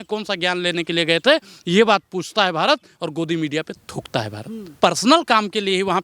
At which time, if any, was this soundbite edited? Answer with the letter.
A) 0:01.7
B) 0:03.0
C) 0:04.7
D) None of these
C